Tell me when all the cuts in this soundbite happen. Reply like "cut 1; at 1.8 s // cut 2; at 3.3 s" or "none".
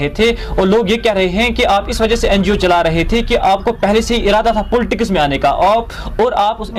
none